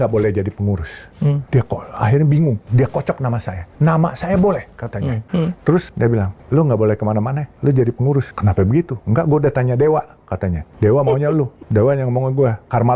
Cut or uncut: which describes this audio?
cut